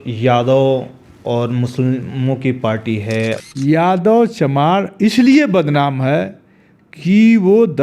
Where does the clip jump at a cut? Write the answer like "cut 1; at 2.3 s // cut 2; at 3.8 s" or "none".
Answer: cut 1; at 3.4 s